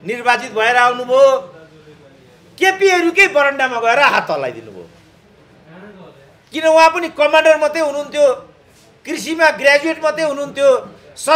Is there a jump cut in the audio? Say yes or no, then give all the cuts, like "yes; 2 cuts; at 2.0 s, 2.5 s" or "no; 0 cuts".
no; 0 cuts